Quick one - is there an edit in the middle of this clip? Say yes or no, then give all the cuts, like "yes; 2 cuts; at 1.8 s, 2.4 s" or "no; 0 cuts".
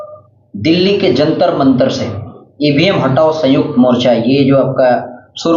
no; 0 cuts